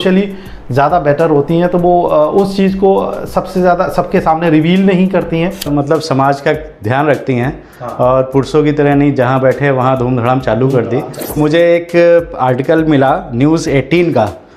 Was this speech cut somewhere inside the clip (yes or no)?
yes